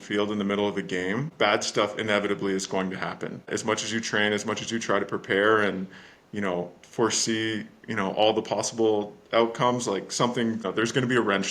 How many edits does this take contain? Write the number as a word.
three